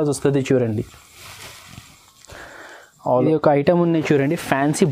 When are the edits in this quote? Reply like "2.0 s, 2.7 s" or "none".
3.1 s